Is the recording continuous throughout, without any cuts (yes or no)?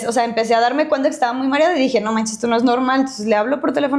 yes